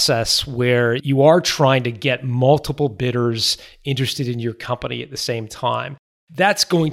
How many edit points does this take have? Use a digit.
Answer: 1